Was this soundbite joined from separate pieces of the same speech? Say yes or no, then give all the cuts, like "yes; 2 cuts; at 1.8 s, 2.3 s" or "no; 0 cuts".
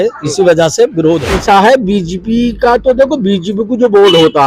yes; 1 cut; at 1.3 s